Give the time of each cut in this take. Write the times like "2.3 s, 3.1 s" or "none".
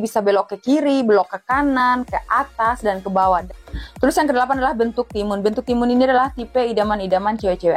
3.4 s

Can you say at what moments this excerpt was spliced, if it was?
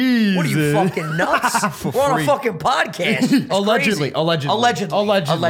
3.5 s

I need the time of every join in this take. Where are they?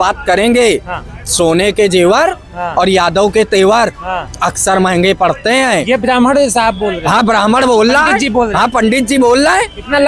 none

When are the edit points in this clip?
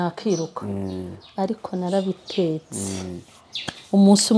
none

